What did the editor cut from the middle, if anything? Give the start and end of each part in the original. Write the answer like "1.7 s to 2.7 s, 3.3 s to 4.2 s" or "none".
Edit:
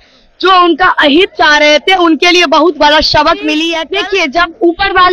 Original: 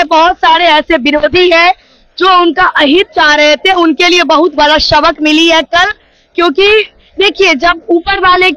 5.6 s to 7.1 s